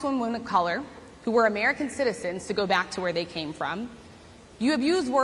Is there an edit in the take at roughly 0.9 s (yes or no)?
no